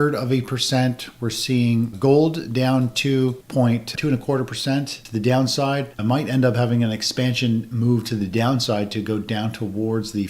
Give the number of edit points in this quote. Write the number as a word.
one